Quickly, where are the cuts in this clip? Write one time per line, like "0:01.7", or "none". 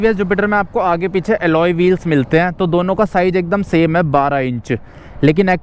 none